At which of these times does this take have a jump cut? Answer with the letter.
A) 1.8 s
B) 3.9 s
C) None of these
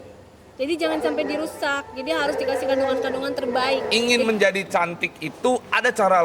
B